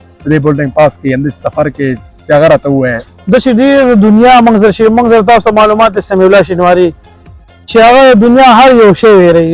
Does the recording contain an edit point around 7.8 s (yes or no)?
no